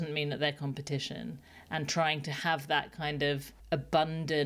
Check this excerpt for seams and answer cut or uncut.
cut